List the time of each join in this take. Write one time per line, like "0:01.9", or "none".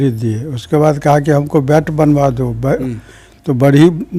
none

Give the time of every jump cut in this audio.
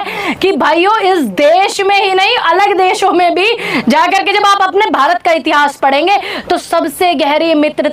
none

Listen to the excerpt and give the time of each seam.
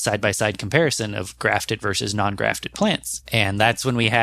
0:03.1

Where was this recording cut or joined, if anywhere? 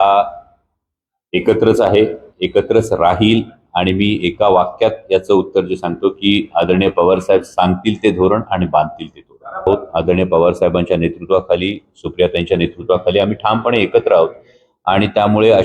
0:09.7

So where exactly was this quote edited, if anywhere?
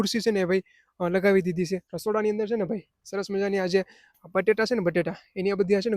0:01.9

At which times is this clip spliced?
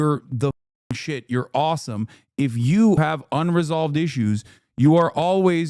0:03.0

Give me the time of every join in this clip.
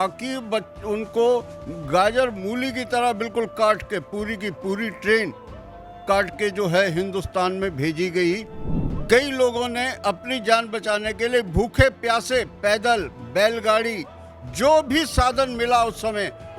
0:08.5

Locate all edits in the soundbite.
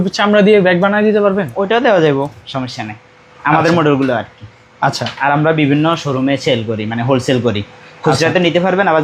none

